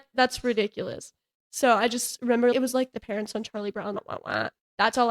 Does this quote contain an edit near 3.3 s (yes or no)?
no